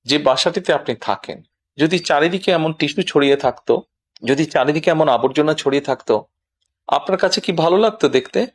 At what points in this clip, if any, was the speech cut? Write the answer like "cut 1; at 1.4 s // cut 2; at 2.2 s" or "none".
none